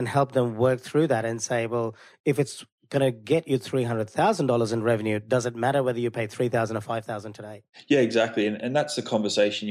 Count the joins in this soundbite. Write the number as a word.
zero